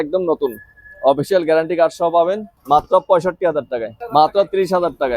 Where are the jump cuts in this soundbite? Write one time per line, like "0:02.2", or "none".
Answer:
0:02.5
0:03.9